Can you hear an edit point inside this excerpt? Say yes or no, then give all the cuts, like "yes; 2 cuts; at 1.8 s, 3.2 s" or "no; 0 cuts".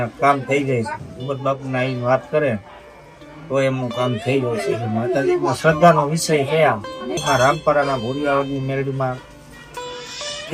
no; 0 cuts